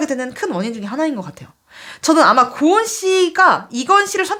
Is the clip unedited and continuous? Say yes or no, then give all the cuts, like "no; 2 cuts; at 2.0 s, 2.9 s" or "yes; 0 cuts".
yes; 0 cuts